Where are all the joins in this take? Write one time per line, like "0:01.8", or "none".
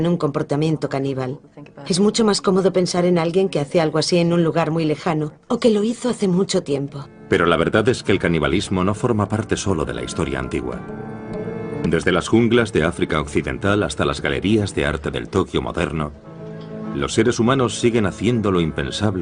0:01.0

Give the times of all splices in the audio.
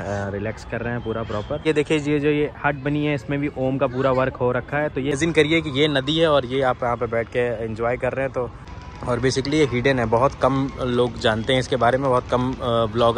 0:01.6
0:05.1
0:08.6

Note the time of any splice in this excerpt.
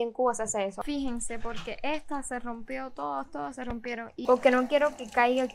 0:00.8
0:04.2

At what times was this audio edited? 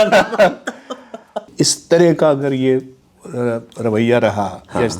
0:01.5

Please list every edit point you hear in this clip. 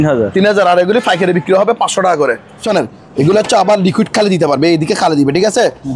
0:02.6

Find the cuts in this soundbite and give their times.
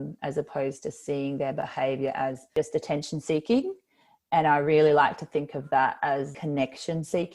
0:02.5
0:06.3

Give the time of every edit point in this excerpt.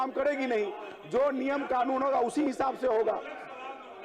none

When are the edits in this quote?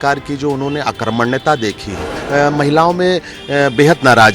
0:02.1

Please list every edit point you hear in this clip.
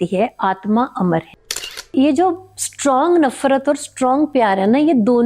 0:01.9

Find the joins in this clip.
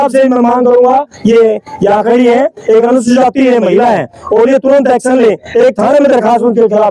none

